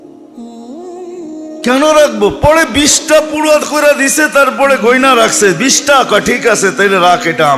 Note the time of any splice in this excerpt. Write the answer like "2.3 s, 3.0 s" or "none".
1.6 s